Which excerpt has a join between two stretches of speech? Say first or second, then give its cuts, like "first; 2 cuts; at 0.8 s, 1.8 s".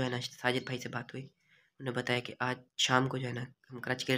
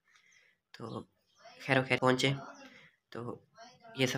second; 1 cut; at 2.0 s